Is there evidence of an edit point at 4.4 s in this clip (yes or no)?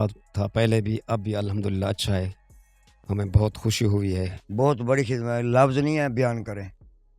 yes